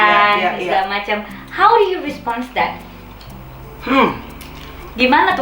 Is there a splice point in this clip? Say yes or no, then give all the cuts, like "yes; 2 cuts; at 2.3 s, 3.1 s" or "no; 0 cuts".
no; 0 cuts